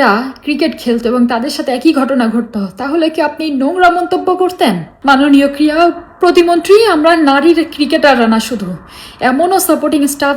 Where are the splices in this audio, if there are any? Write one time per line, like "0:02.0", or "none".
0:04.9

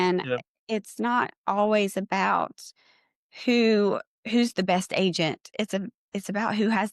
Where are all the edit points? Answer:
0:05.5

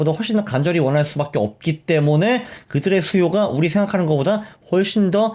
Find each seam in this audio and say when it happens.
none

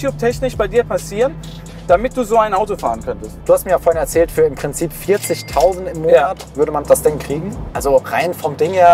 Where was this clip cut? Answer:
none

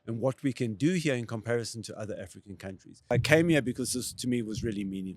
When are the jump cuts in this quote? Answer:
0:03.1

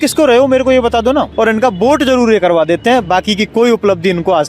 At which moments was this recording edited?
0:01.3

